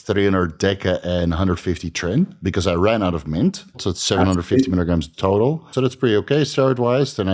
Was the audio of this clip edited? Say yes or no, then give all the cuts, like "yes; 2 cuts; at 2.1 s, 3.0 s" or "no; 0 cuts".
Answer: yes; 2 cuts; at 3.9 s, 5.7 s